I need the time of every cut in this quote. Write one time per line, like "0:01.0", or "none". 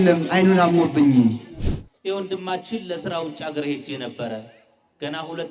0:01.8